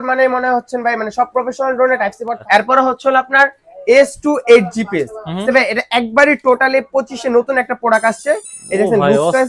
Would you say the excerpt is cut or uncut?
cut